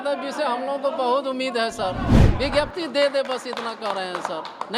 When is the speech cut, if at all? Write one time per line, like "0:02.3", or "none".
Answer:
0:02.2